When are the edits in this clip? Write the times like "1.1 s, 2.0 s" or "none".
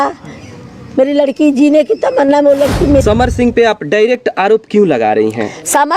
3.0 s